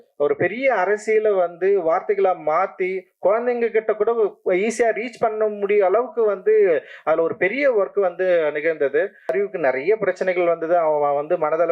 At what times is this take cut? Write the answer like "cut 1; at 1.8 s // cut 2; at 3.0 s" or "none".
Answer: cut 1; at 9.3 s

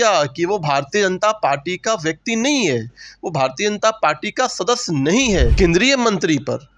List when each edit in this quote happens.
cut 1; at 5.5 s

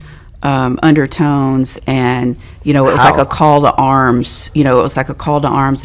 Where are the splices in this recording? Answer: cut 1; at 2.0 s // cut 2; at 3.3 s

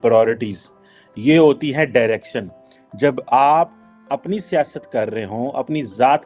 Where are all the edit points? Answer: none

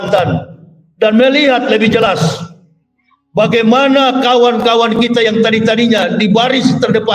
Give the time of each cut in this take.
none

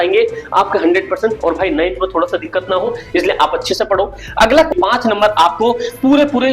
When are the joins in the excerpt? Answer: cut 1; at 4.7 s

